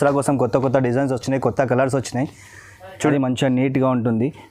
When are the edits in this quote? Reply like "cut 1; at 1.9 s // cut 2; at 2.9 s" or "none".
cut 1; at 3.1 s